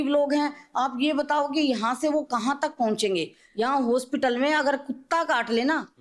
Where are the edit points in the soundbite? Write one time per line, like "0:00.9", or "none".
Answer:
0:03.4